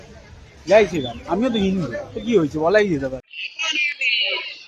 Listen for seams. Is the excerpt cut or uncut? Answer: uncut